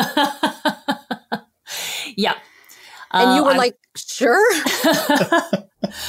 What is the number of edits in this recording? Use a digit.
0